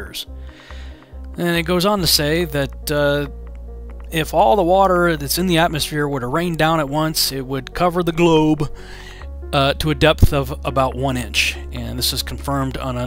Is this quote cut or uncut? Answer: cut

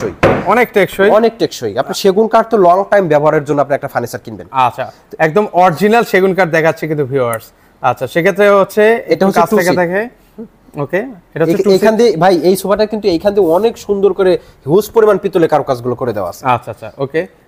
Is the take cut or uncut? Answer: uncut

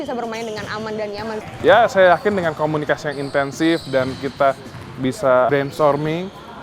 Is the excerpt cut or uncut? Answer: cut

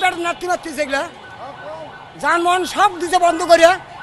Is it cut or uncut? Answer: uncut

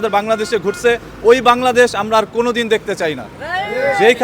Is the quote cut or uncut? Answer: uncut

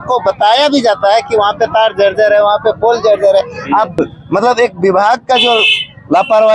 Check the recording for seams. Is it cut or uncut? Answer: cut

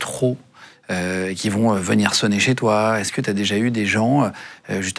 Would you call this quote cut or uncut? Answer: uncut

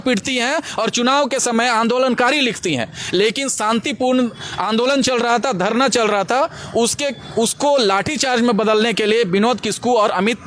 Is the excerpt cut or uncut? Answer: uncut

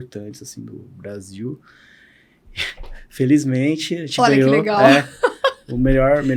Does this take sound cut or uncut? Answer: uncut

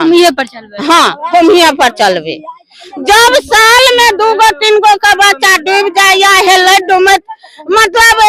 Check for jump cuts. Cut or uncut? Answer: uncut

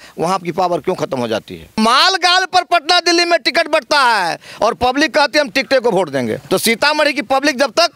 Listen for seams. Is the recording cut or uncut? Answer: cut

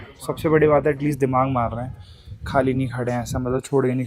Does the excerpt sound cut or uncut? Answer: uncut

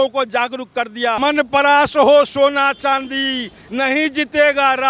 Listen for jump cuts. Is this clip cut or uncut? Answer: cut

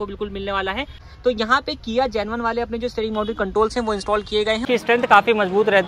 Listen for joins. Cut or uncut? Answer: cut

